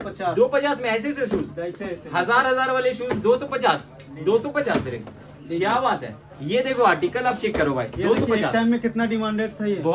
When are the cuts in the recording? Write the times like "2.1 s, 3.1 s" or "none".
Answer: none